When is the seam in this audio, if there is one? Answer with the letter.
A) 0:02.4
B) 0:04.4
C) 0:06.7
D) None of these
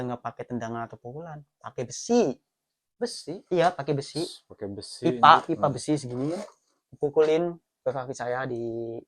D